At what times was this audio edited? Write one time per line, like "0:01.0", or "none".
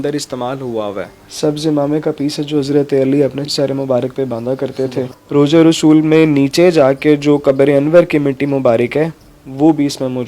0:01.1
0:03.5
0:05.2